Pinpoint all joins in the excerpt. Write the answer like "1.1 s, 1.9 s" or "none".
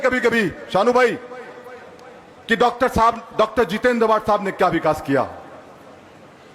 none